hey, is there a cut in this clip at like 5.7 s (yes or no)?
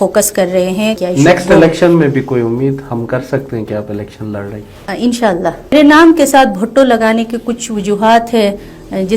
yes